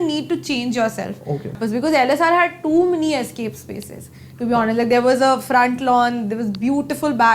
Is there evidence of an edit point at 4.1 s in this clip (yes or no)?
no